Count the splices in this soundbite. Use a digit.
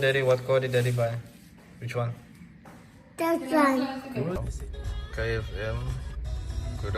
1